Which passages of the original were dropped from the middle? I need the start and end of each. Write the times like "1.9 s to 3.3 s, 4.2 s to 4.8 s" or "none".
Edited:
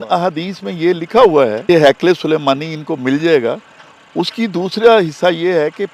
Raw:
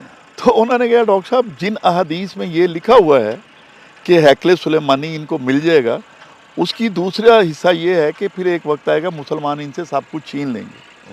3.3 s to 4.0 s